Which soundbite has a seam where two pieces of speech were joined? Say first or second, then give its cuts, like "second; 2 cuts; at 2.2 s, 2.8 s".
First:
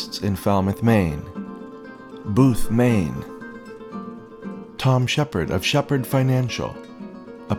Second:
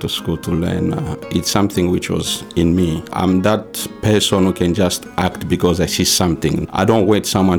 second; 2 cuts; at 3.1 s, 6.6 s